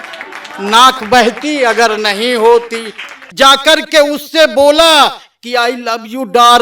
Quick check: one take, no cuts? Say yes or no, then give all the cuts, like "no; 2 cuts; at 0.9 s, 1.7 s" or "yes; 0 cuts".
no; 1 cut; at 3.3 s